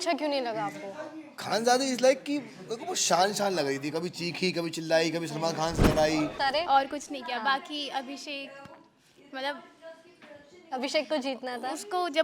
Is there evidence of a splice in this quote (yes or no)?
yes